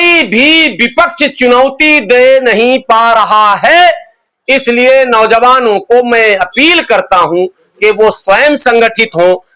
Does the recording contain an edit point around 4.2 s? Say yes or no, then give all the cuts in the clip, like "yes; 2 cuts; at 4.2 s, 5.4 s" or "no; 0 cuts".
no; 0 cuts